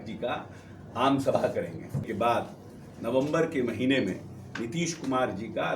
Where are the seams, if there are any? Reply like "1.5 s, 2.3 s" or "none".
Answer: 2.1 s